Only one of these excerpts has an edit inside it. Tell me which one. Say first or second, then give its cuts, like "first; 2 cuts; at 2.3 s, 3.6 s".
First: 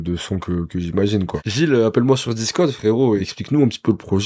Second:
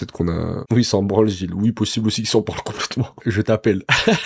first; 2 cuts; at 1.4 s, 3.2 s